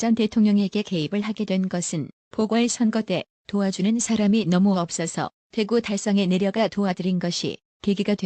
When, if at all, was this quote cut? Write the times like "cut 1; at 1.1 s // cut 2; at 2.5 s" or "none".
cut 1; at 6.1 s